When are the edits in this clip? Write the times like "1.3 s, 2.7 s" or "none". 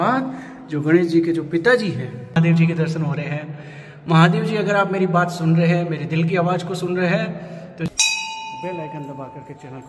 2.4 s, 7.9 s